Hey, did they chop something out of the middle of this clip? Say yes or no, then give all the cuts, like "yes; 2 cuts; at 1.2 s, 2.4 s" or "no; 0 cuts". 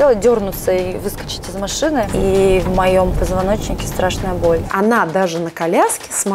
yes; 2 cuts; at 2.1 s, 4.7 s